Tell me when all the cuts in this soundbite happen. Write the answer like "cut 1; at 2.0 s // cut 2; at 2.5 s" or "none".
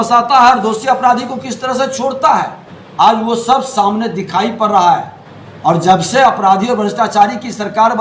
none